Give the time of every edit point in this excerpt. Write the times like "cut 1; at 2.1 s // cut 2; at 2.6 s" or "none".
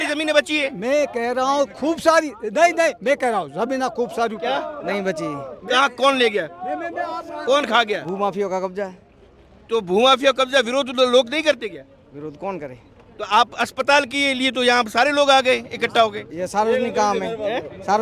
none